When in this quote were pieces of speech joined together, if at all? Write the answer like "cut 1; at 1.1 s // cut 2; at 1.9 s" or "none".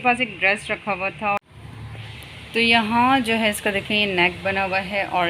cut 1; at 1.4 s

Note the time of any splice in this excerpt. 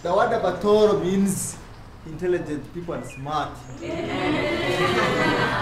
none

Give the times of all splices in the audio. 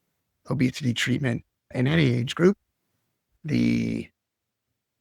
cut 1; at 3.3 s

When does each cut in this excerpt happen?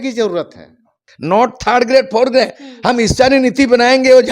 cut 1; at 1.1 s

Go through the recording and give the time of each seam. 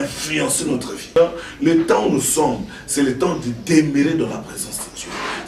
cut 1; at 1.2 s

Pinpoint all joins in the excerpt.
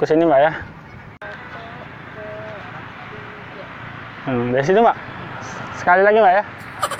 cut 1; at 1.2 s

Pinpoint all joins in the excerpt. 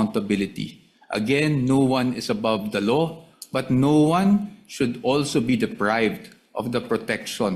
none

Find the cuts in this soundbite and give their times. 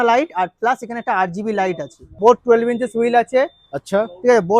cut 1; at 2.2 s

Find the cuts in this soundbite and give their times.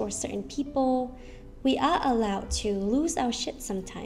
none

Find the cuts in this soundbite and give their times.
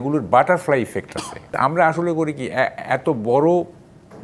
cut 1; at 1.5 s

